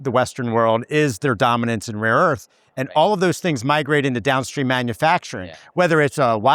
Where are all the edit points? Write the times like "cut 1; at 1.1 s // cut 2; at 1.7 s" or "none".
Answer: none